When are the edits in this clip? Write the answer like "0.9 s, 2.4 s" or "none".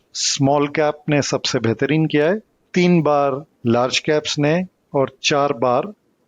2.6 s, 3.5 s, 4.8 s